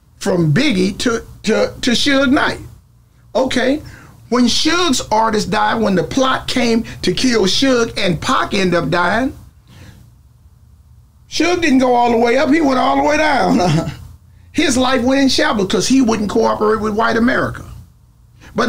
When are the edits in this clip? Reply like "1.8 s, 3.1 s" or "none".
none